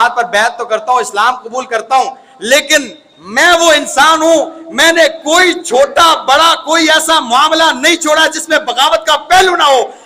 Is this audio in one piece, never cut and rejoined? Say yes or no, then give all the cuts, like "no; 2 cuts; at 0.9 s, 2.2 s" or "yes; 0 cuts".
yes; 0 cuts